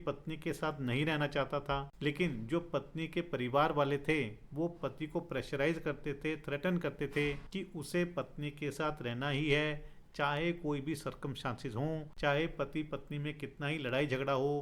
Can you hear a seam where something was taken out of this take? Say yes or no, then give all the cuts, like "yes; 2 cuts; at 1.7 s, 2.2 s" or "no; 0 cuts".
yes; 3 cuts; at 1.9 s, 7.4 s, 12.1 s